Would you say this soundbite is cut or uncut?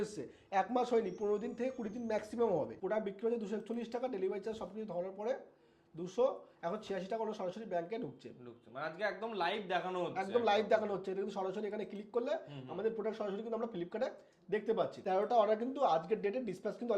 cut